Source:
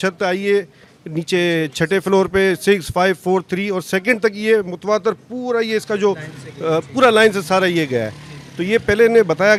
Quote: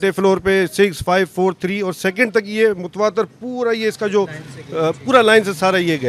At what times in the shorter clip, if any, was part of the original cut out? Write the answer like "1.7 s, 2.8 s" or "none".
none